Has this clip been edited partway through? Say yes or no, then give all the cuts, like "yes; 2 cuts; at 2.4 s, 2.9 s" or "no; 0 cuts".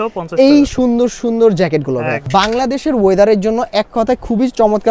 yes; 1 cut; at 2.2 s